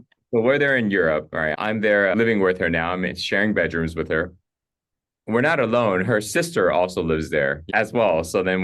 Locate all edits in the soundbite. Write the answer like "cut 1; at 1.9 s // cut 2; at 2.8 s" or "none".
cut 1; at 2.1 s